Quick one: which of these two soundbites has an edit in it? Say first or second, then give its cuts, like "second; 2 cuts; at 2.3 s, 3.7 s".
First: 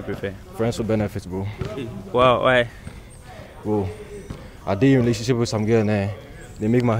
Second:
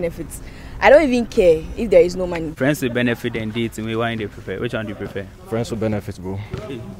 second; 1 cut; at 2.5 s